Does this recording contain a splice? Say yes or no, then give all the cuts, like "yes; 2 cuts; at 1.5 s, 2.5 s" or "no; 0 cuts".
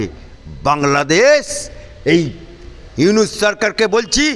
no; 0 cuts